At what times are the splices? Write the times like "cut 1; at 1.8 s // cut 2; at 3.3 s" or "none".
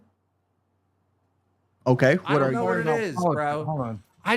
cut 1; at 2.5 s